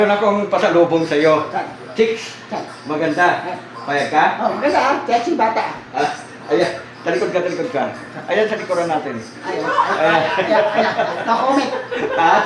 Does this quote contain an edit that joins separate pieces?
no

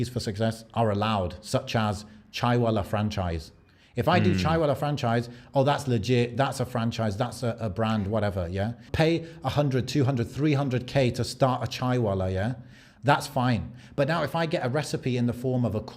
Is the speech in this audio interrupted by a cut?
yes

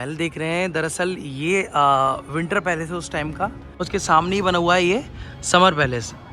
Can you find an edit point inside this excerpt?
yes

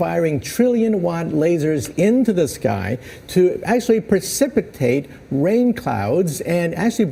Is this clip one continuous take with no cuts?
yes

